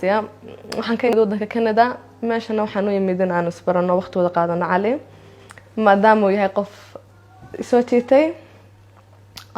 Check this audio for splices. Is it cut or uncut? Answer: cut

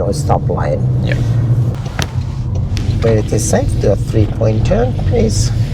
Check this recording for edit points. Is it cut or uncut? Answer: cut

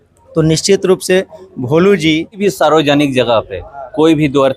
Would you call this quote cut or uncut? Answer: cut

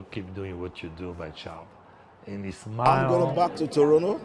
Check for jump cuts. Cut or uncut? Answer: cut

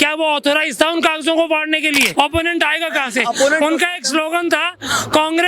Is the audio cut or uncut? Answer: cut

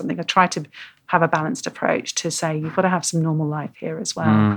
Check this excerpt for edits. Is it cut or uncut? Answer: uncut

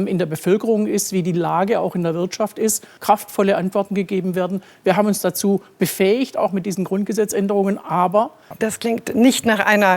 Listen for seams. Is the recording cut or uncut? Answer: cut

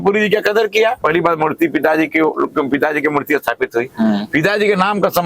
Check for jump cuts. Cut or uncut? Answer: cut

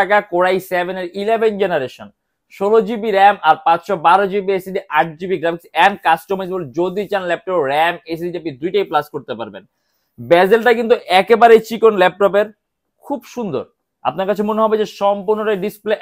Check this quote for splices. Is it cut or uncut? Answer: uncut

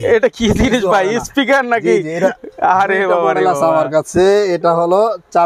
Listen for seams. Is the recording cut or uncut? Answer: uncut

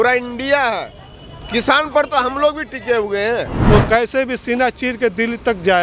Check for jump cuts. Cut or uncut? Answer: cut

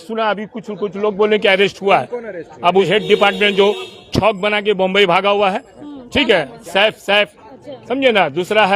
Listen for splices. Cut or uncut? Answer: cut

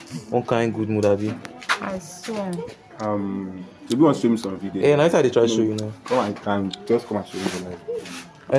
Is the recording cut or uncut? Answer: uncut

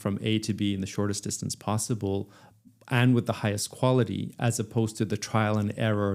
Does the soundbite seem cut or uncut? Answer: uncut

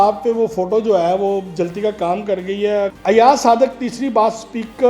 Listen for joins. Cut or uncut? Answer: cut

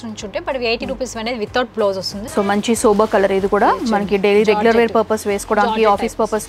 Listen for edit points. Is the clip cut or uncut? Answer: cut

